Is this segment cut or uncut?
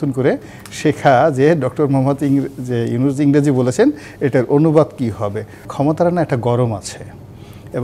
cut